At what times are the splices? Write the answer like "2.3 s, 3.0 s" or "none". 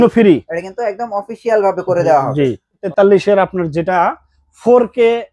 2.8 s